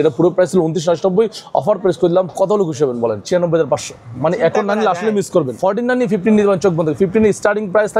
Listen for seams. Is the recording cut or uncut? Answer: cut